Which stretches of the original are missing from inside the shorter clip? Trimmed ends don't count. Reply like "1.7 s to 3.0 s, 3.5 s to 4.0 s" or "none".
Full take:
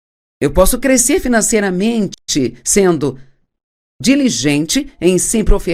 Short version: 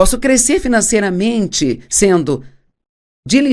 2.1 s to 2.3 s